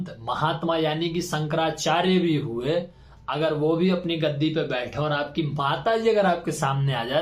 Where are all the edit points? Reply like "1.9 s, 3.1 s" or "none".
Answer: none